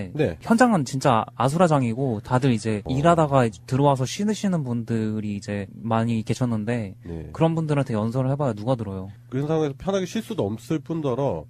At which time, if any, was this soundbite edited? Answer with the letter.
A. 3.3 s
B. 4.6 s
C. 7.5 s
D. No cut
D